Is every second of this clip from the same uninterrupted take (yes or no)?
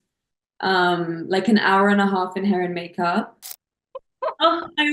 no